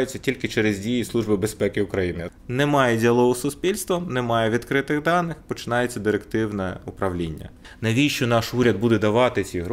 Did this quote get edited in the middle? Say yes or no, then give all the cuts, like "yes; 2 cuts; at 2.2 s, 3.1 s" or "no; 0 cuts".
yes; 2 cuts; at 2.3 s, 7.7 s